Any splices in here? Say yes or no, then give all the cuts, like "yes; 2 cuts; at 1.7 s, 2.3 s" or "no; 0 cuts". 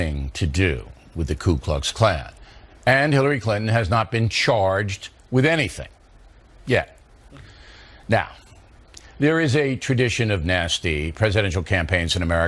yes; 1 cut; at 6.9 s